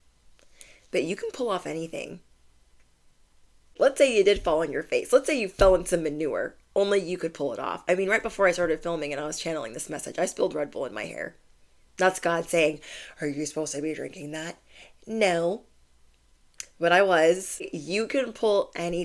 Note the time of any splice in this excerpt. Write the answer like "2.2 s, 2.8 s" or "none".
3.8 s, 17.8 s